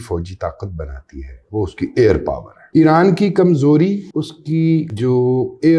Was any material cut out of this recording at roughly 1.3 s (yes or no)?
no